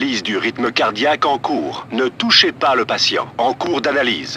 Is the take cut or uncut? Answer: cut